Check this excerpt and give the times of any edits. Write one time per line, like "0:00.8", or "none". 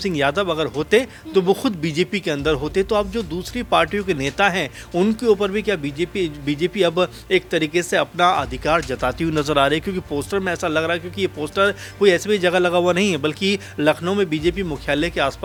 none